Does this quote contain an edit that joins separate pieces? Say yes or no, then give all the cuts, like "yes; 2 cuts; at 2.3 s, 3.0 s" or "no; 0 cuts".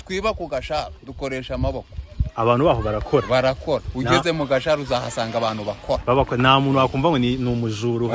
no; 0 cuts